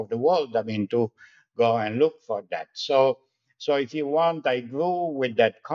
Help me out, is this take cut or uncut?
uncut